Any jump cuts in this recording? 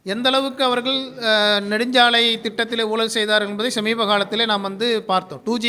no; 0 cuts

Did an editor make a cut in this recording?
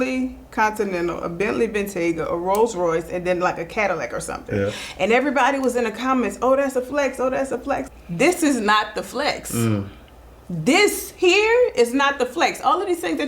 yes; 1 cut; at 7.8 s

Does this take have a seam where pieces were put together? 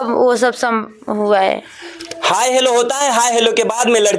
no; 0 cuts

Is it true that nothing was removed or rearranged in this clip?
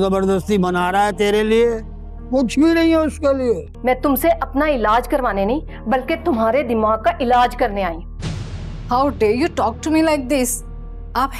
no; 1 cut; at 3.7 s

